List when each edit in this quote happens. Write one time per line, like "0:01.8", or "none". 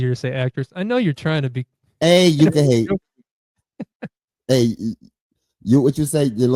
none